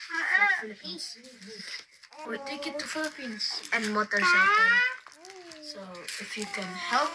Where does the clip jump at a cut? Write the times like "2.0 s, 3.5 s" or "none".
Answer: none